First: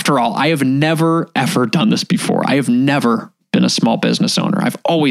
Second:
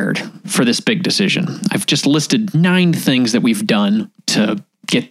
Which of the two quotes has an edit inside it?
second; 2 cuts; at 2.6 s, 4.2 s

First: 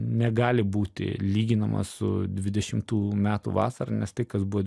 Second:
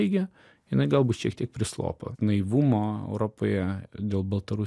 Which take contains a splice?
second; 1 cut; at 2.1 s

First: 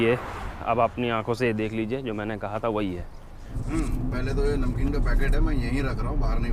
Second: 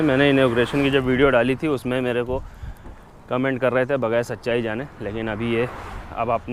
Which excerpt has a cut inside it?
first; 1 cut; at 3.6 s

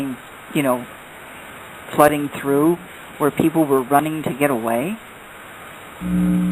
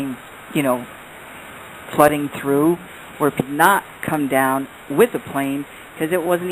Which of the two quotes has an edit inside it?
first; 1 cut; at 3.4 s

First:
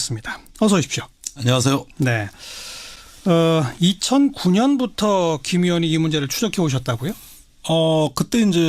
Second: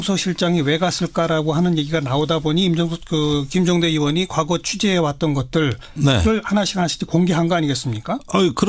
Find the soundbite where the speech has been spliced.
first; 1 cut; at 6.3 s

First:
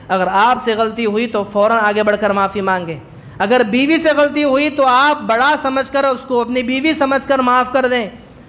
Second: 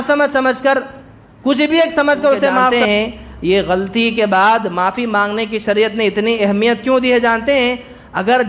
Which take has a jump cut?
second; 1 cut; at 2.7 s

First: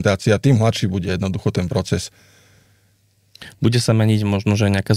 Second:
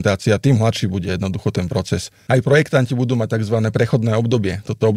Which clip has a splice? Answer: second; 1 cut; at 2.1 s

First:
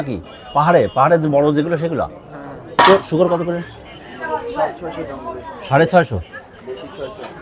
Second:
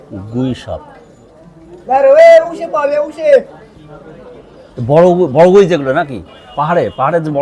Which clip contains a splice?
first; 1 cut; at 2.8 s

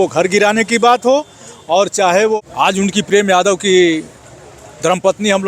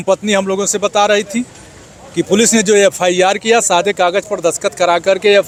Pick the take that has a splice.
first; 1 cut; at 2.4 s

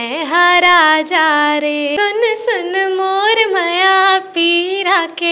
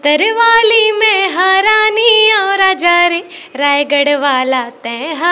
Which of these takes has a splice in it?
first; 1 cut; at 2.0 s

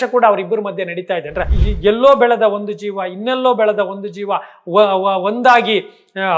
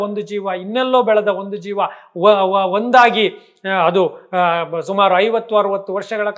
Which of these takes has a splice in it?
first; 1 cut; at 1.6 s

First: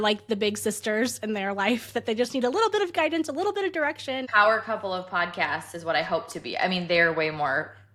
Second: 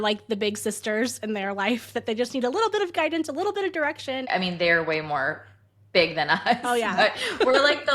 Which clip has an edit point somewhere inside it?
second; 1 cut; at 4.2 s

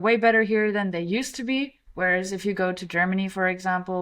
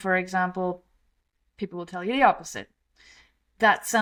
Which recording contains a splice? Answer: first; 1 cut; at 1.8 s

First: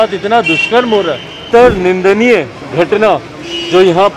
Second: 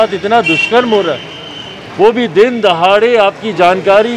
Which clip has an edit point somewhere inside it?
first; 1 cut; at 1.4 s

